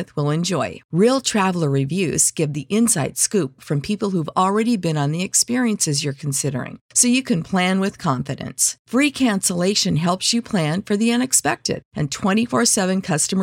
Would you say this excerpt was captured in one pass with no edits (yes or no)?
yes